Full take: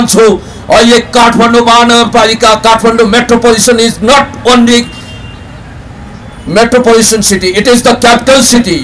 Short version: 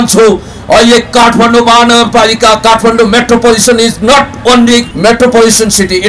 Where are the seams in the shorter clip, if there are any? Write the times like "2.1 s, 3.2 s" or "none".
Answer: 4.9 s